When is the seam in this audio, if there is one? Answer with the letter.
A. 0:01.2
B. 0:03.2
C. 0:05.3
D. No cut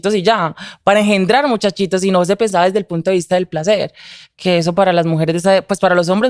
D